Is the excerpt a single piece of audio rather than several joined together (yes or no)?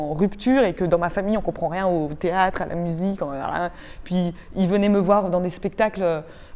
yes